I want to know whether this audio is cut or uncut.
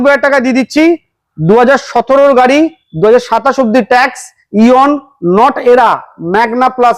uncut